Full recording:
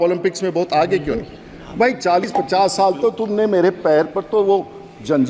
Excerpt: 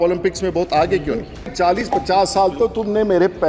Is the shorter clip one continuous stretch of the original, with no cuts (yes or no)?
no